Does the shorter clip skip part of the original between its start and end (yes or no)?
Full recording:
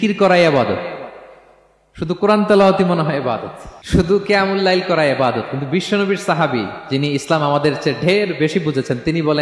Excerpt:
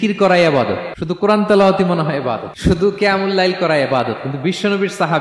yes